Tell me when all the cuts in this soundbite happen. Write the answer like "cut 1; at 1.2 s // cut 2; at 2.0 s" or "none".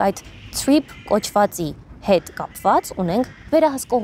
none